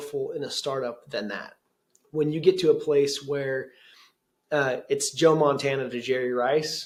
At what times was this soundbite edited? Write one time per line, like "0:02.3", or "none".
none